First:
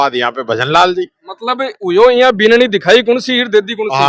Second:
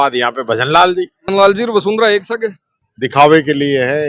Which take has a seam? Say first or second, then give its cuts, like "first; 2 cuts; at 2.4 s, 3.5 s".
second; 1 cut; at 1.2 s